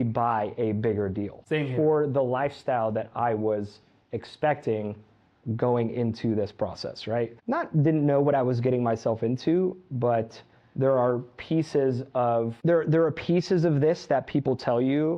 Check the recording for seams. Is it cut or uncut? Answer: cut